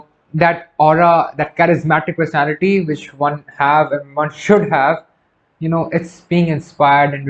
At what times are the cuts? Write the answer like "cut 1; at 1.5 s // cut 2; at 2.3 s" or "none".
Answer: none